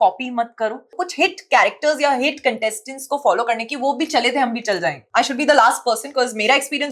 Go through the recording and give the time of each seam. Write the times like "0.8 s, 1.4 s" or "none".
0.9 s, 5.0 s

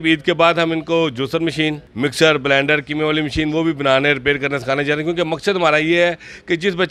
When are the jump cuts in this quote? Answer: 1.8 s

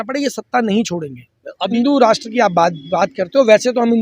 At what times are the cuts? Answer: 1.7 s

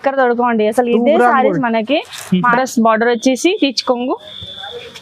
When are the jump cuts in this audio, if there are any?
2.4 s

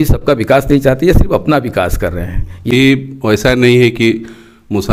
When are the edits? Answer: 2.7 s

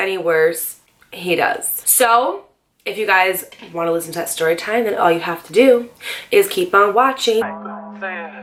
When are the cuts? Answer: none

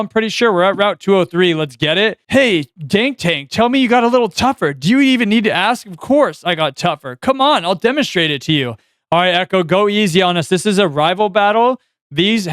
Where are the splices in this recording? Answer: none

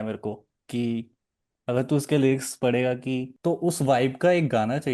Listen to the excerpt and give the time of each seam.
3.3 s

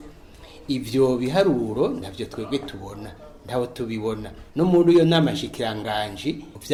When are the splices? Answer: none

